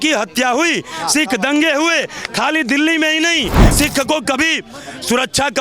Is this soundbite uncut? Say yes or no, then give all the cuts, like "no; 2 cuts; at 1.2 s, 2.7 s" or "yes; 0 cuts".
no; 1 cut; at 3.7 s